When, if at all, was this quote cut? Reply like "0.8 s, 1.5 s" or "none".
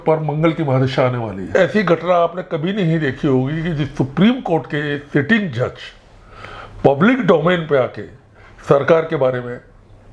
1.5 s